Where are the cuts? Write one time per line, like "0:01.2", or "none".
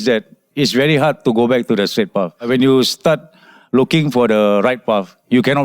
0:02.5